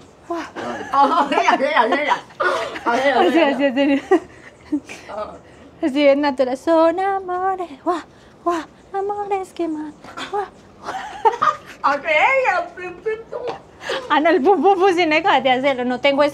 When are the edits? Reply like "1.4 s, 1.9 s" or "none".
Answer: none